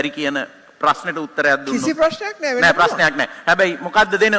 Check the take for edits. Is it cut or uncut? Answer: uncut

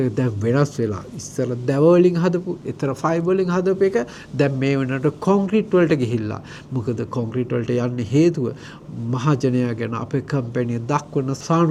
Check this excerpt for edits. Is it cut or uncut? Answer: uncut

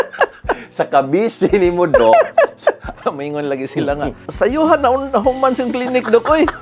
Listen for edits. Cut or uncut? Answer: cut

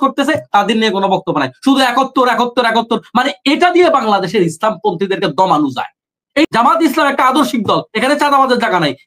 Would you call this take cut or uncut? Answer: cut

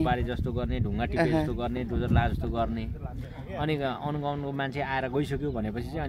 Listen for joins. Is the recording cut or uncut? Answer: uncut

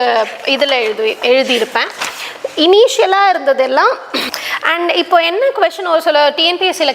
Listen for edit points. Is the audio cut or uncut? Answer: cut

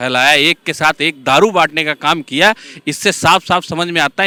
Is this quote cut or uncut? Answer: uncut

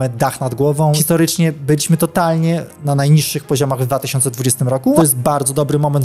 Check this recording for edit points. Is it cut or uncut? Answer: cut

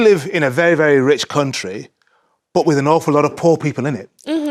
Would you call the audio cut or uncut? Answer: uncut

